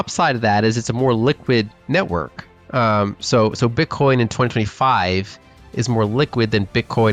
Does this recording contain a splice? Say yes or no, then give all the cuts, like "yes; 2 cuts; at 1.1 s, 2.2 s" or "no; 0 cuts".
no; 0 cuts